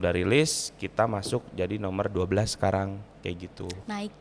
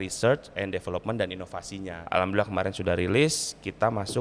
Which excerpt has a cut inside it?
second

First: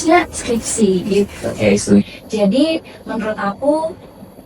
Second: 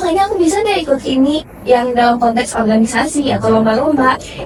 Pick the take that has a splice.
first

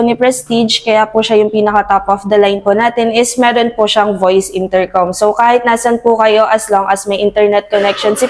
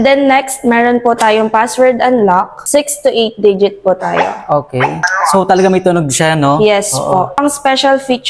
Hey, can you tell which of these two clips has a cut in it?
second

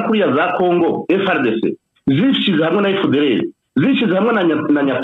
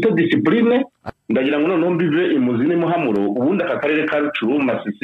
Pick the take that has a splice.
second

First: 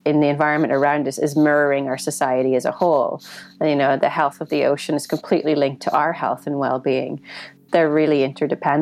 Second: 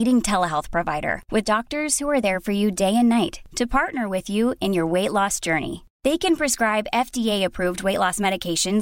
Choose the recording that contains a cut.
first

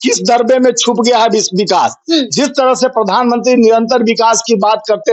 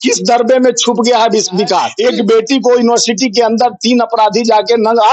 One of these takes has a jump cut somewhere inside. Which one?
second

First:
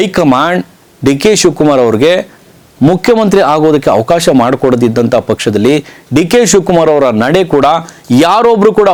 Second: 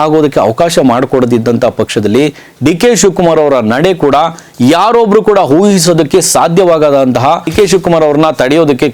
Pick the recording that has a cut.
second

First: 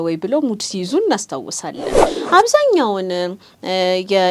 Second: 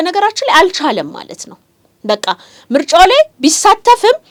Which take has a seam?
first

